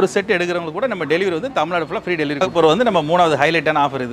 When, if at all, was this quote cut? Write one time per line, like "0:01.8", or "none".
0:02.5